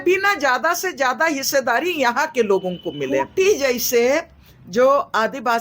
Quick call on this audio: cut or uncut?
cut